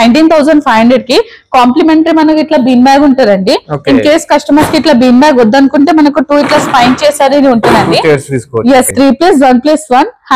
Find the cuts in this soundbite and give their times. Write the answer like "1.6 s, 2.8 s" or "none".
8.9 s